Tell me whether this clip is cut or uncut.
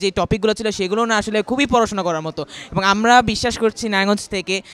uncut